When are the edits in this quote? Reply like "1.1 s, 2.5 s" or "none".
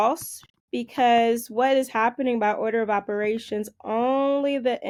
none